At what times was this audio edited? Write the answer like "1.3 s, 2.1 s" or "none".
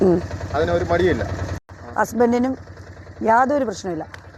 1.6 s